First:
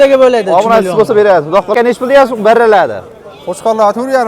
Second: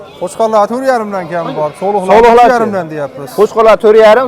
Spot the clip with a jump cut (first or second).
first